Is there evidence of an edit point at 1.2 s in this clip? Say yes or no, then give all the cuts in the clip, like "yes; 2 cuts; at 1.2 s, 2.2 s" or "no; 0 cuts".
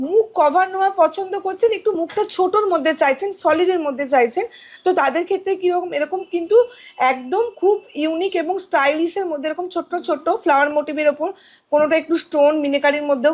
no; 0 cuts